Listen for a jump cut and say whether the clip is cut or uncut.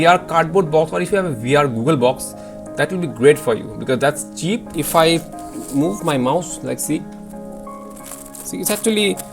cut